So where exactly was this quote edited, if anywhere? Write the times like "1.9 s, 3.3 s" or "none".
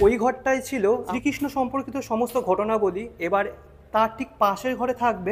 1.0 s